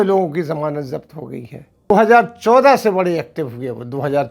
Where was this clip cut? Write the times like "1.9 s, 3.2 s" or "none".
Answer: 1.9 s

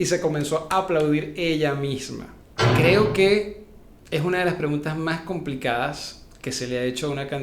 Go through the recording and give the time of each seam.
2.6 s

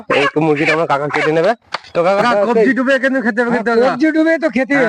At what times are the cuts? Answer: 2.2 s

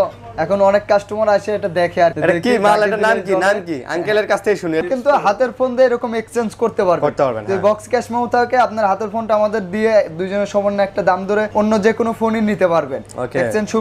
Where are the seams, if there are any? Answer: 2.2 s, 4.9 s, 11.5 s

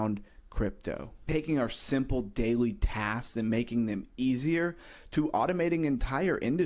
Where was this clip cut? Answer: 1.2 s

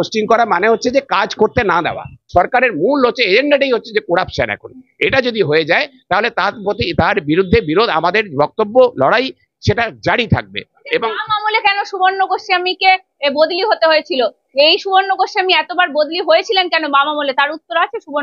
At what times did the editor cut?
none

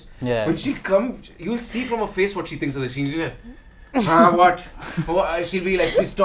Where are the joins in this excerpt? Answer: none

